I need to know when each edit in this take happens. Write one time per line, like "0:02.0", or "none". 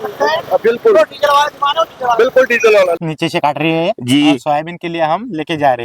0:03.1